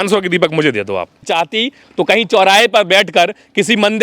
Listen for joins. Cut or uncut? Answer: cut